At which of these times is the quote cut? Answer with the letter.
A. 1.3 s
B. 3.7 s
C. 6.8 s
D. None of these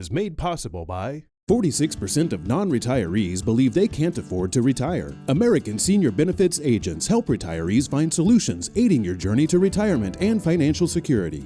A